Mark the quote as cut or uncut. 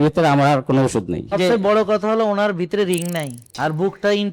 cut